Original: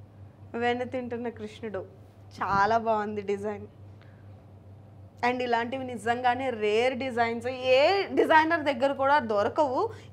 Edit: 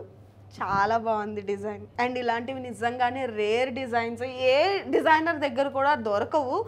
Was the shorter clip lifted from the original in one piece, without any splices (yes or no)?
no